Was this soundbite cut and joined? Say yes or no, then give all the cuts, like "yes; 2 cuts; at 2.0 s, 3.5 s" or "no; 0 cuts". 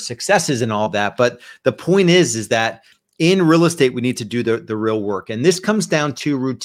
no; 0 cuts